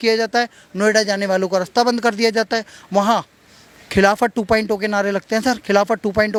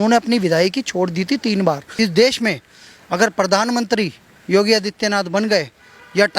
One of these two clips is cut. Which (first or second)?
second